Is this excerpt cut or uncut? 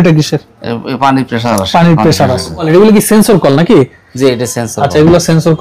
cut